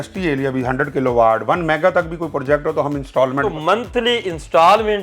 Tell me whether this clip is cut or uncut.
cut